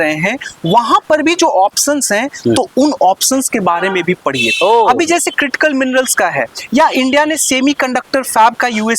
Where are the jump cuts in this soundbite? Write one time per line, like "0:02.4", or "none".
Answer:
none